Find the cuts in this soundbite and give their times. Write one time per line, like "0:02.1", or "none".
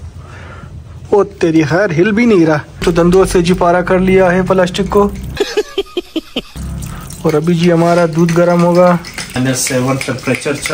0:02.8
0:09.4